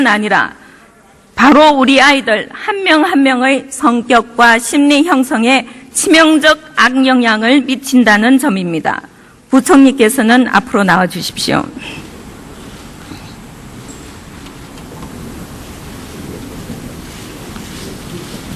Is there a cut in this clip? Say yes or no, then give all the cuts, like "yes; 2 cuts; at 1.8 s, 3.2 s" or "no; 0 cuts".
no; 0 cuts